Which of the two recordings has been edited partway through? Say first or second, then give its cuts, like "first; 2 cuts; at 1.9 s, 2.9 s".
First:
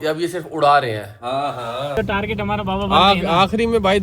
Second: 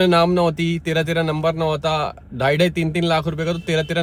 first; 1 cut; at 1.9 s